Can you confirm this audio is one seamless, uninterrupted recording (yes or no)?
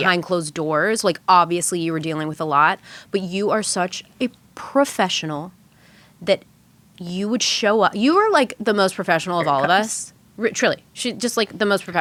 yes